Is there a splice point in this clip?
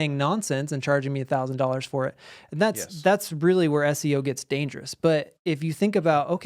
no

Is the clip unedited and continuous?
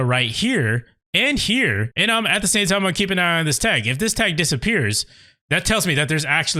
no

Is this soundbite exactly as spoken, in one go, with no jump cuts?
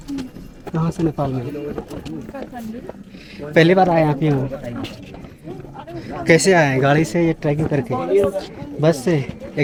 yes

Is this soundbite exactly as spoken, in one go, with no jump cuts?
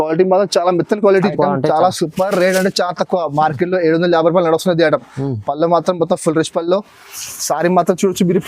no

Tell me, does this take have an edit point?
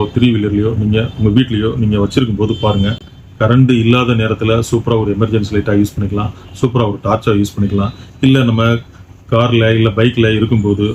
no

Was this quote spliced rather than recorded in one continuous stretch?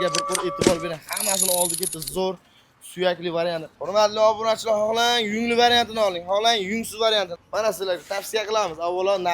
yes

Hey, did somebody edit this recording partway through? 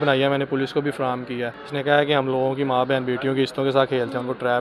yes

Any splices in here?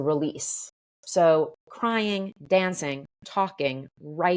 no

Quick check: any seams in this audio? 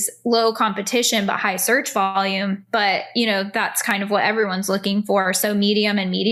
no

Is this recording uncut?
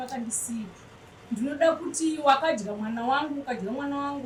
yes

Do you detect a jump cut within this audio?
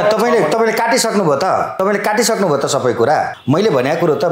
yes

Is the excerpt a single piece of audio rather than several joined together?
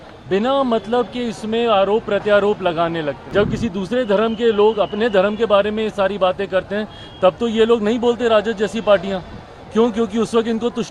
no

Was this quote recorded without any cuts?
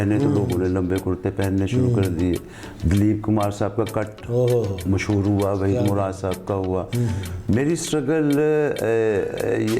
no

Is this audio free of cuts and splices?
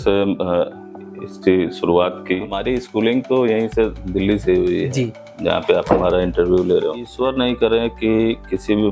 no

